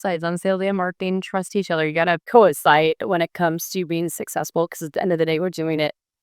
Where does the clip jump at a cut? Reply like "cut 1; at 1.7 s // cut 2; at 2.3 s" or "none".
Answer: cut 1; at 2.2 s